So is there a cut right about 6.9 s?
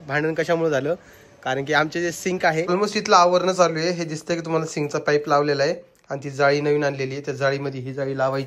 no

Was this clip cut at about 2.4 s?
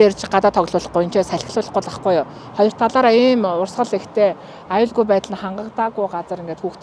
no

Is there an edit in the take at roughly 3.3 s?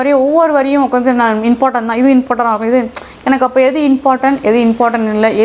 no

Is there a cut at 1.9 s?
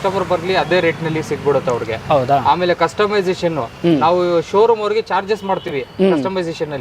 no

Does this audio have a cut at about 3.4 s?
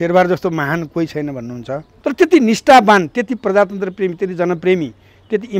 no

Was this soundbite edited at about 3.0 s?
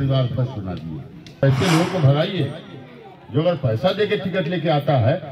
no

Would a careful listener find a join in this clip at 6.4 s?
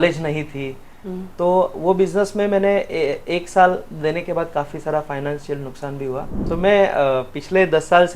yes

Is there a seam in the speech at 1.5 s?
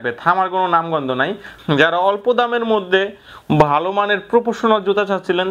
yes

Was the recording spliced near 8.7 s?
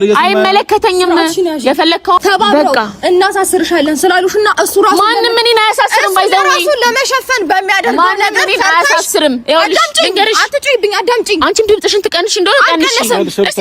no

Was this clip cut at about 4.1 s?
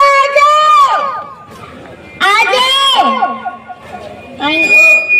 no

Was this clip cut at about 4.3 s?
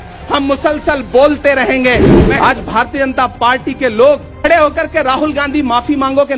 yes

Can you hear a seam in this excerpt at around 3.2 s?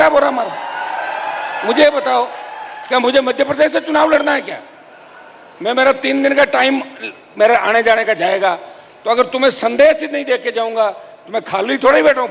no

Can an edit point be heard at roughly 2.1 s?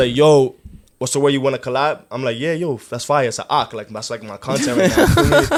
no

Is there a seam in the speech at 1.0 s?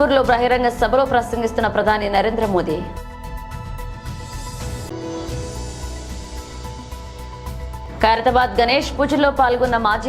no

